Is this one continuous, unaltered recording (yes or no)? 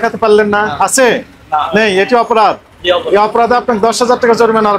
yes